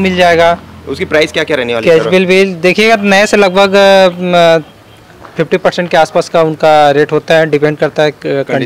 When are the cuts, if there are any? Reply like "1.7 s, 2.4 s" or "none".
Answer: none